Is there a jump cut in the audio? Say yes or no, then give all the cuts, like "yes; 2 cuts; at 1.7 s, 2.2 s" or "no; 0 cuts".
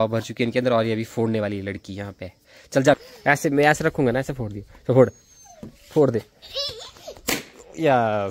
yes; 1 cut; at 3.0 s